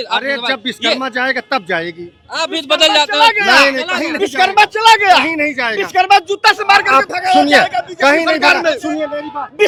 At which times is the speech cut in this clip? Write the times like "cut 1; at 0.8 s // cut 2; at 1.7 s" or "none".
none